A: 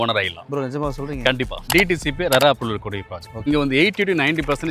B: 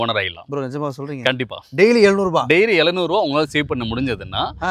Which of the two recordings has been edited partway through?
A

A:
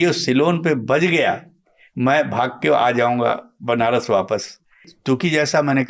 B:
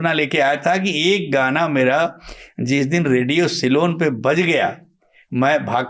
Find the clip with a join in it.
A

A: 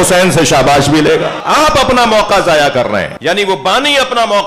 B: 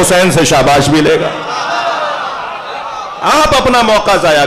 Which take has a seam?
A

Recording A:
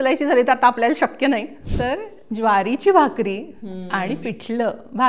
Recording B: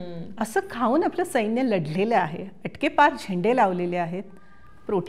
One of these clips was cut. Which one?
A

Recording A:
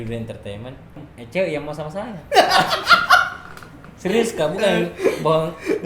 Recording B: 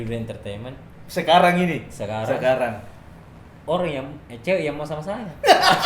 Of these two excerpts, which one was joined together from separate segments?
A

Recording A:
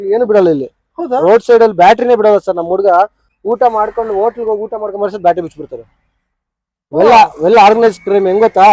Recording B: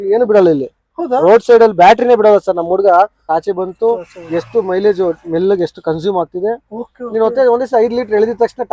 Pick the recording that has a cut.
B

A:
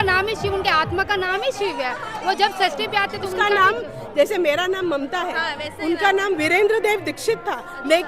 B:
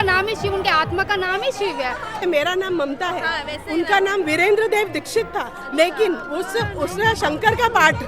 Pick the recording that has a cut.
B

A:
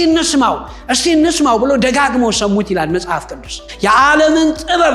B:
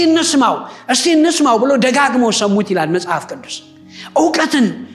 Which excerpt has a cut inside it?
A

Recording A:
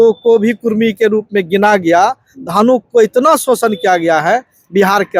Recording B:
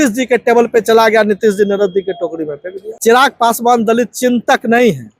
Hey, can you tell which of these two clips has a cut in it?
B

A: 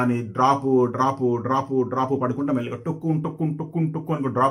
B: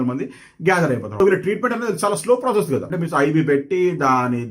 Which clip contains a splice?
B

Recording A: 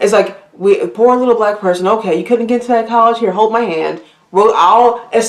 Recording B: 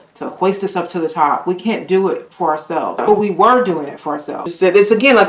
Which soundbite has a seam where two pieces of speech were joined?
B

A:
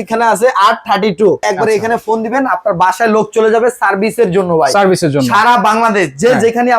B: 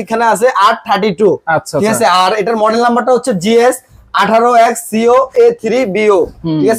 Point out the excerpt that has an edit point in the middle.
A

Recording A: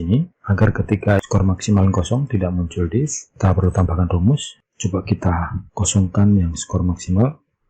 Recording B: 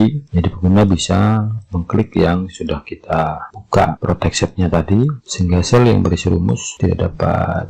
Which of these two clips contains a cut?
A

